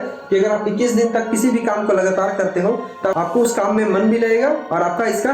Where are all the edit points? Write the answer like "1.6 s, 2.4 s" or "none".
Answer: 3.1 s